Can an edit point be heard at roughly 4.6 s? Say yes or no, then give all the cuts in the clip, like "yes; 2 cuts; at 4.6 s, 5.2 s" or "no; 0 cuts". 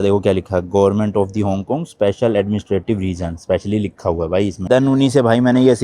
yes; 1 cut; at 4.6 s